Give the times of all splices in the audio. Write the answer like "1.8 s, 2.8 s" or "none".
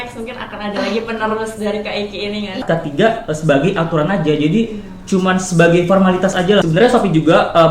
2.6 s, 6.6 s